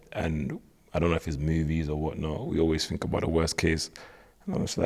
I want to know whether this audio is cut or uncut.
uncut